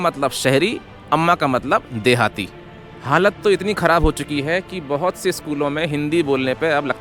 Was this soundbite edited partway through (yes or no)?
no